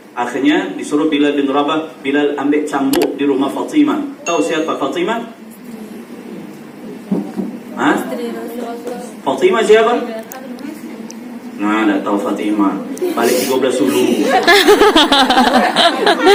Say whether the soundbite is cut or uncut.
uncut